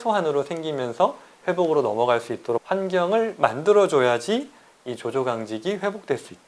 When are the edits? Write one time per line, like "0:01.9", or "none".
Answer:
0:02.6

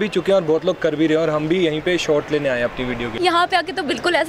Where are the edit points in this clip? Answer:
0:03.1

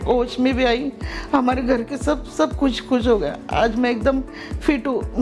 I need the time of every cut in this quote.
none

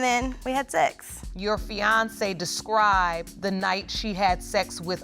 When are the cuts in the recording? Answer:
none

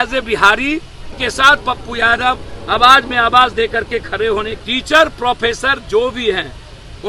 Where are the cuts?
0:01.2
0:04.5

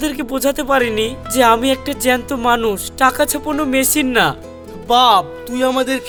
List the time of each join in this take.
none

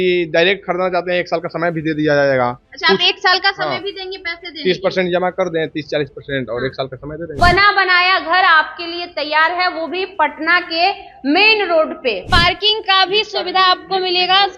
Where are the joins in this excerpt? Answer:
0:07.4
0:12.3

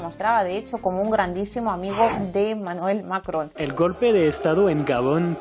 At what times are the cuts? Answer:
0:03.6

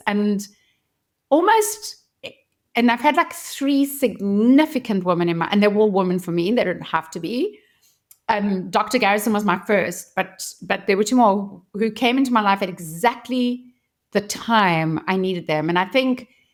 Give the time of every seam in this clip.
none

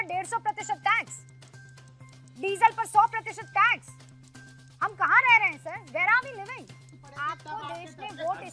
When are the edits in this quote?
none

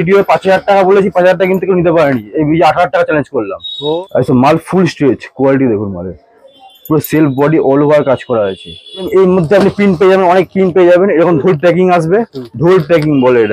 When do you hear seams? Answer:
0:04.0
0:09.1

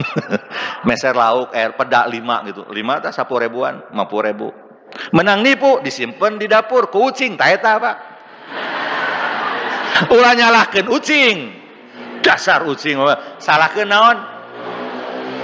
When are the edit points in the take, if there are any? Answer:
none

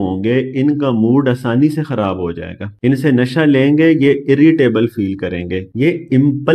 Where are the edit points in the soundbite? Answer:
none

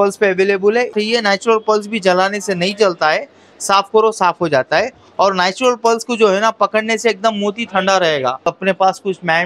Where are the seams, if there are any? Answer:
0:00.9
0:08.5

